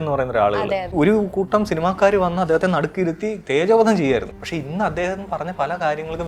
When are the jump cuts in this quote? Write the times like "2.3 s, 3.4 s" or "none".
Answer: 0.9 s, 4.4 s